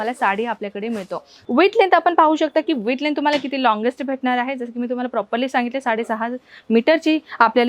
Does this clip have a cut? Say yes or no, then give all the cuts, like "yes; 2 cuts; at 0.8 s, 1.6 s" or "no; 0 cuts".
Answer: yes; 1 cut; at 1.4 s